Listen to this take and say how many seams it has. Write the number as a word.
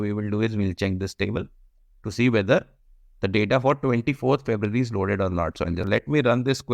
one